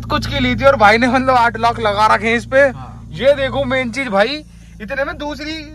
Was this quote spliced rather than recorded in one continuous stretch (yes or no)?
no